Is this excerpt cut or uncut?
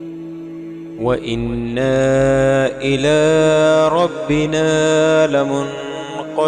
cut